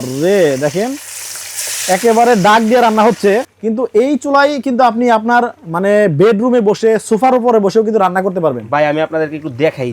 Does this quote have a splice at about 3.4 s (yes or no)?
yes